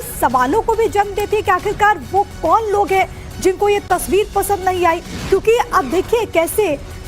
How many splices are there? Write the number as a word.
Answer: one